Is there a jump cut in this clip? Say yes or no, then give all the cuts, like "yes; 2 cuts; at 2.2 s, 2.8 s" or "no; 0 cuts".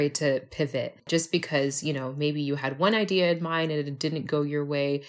yes; 1 cut; at 1.1 s